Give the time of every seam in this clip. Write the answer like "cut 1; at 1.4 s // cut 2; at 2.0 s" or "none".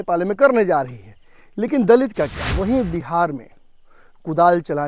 cut 1; at 2.4 s

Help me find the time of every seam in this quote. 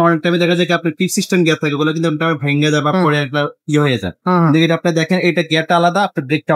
none

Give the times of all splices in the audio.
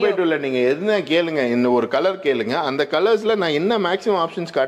none

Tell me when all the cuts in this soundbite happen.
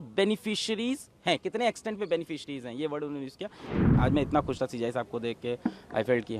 cut 1; at 3.7 s

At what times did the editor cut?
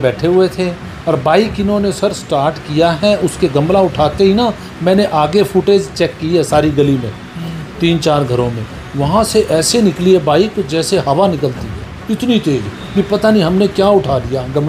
none

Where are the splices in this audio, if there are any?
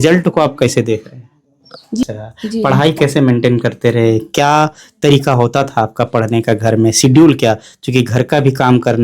cut 1; at 2.0 s

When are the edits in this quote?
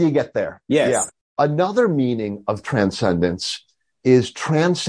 cut 1; at 1.1 s

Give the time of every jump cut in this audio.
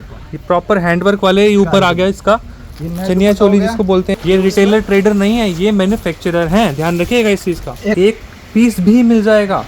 cut 1; at 4.1 s // cut 2; at 8.0 s

